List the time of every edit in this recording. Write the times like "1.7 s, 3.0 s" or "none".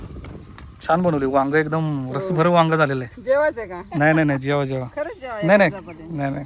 none